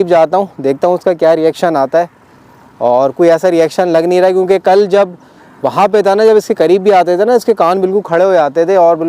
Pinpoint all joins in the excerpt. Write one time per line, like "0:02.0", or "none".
none

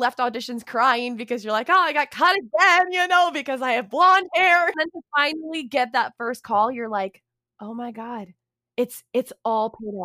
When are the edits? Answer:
0:04.7

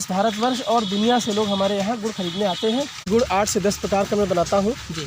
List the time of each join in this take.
0:03.0

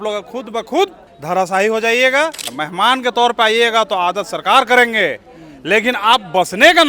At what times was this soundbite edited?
0:02.5

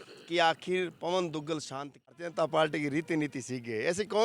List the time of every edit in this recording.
0:02.1

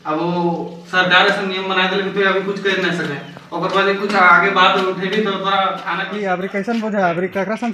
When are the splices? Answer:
0:05.9

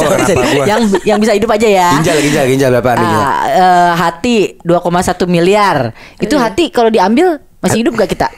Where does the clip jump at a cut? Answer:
none

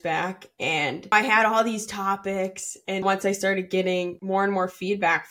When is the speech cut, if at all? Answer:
0:01.1
0:03.0
0:04.2

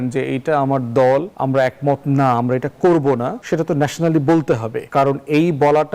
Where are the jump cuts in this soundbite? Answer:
0:01.3
0:03.4
0:04.8

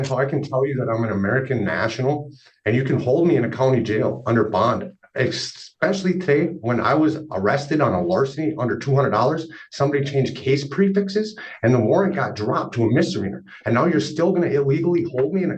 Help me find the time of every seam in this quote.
none

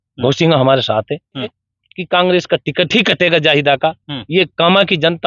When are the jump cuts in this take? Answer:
0:01.5

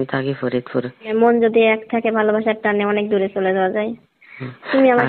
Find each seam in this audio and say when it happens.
0:01.1

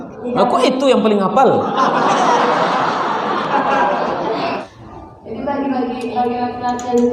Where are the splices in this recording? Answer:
0:04.6

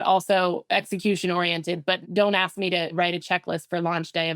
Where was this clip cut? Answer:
0:02.0
0:02.9

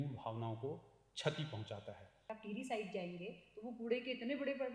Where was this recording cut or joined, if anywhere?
0:02.3

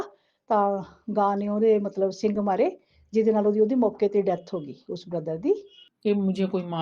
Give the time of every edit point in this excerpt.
0:05.8

